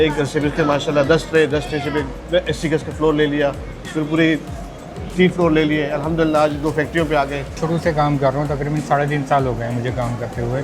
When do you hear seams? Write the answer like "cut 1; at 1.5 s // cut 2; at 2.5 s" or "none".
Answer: cut 1; at 7.6 s